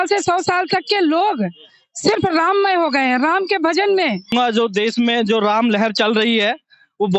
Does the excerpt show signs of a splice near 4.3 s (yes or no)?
yes